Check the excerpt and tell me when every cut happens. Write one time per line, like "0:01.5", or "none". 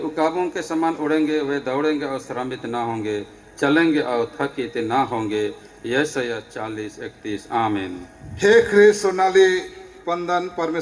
none